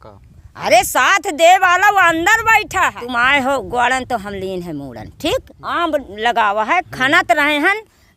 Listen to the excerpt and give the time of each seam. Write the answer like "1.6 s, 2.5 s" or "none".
3.0 s, 5.6 s